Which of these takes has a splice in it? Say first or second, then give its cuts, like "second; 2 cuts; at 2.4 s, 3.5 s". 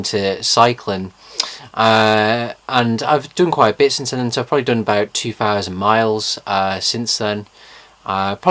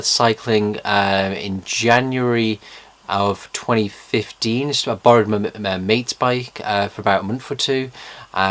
second; 1 cut; at 1.3 s